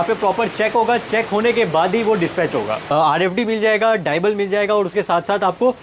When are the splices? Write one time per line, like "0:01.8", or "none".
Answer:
0:02.9